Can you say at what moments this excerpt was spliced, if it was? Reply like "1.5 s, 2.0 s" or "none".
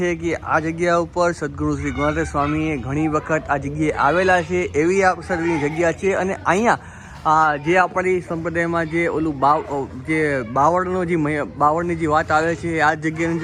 none